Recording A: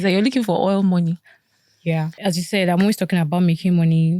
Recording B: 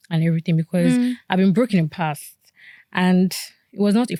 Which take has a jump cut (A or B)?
A